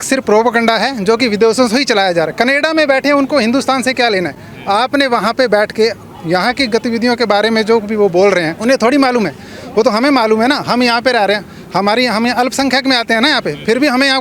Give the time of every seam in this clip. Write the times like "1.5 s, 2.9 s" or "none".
none